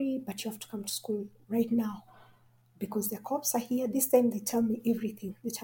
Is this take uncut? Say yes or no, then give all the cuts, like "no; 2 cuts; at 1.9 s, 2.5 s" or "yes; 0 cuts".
yes; 0 cuts